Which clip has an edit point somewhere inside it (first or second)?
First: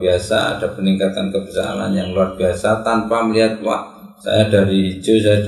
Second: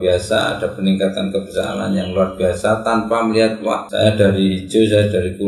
second